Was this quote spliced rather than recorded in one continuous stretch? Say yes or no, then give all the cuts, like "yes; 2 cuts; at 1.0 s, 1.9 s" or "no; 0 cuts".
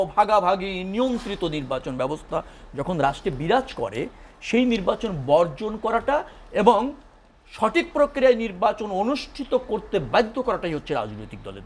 no; 0 cuts